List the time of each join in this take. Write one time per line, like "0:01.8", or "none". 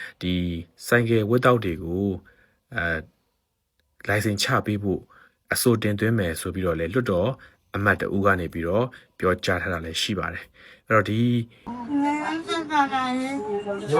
0:11.8